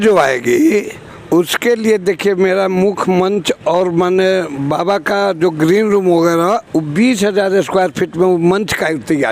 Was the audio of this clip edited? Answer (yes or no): no